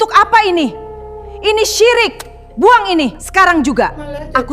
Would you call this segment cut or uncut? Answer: cut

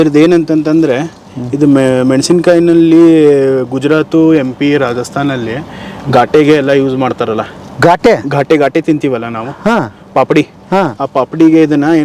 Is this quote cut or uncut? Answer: uncut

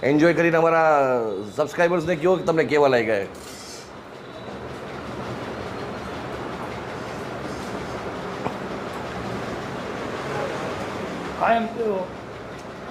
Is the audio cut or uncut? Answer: uncut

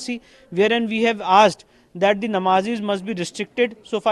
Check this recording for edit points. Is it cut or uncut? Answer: uncut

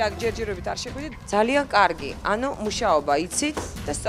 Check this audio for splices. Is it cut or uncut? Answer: cut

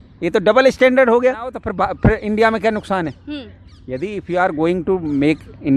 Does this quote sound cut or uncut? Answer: cut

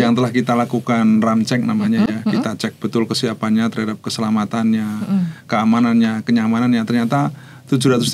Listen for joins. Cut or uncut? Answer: uncut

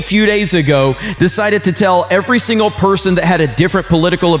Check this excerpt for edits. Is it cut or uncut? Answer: uncut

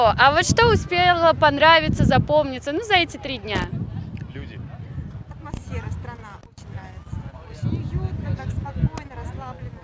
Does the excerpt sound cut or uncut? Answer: uncut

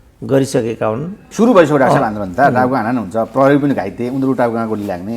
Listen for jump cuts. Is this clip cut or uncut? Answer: cut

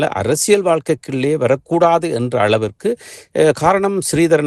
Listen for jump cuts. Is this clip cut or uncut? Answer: uncut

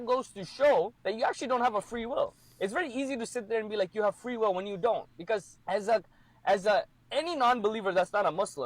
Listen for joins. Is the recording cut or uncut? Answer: cut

